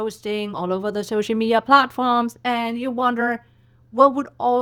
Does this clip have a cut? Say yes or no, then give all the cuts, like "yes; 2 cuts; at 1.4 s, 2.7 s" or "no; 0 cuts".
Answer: no; 0 cuts